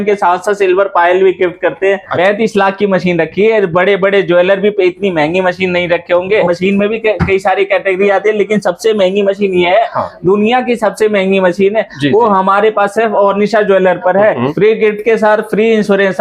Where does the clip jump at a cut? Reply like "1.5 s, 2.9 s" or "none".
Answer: 2.1 s, 14.5 s